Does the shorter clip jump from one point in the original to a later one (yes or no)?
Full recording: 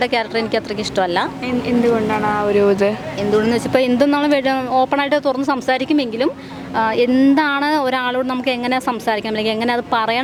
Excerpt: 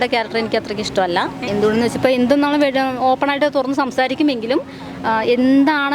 yes